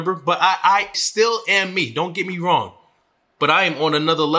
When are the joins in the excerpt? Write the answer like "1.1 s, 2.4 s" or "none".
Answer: 0.9 s